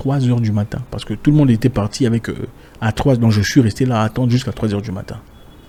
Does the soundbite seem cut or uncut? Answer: uncut